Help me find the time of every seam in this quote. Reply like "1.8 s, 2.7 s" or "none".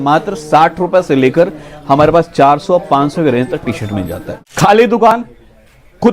4.4 s